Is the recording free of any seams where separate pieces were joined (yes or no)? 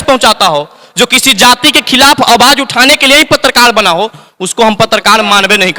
yes